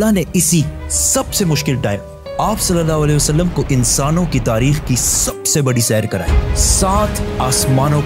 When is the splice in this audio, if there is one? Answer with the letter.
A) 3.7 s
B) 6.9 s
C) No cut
C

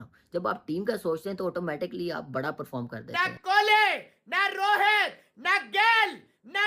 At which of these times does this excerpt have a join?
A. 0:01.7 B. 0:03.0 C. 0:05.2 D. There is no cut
B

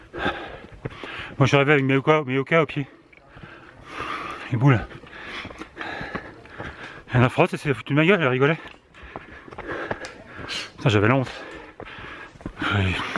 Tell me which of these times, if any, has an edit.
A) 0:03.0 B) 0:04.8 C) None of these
C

